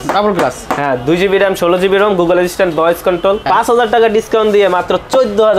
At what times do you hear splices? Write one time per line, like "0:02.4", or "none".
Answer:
0:03.4

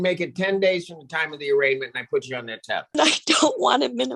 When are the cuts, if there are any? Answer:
0:03.0

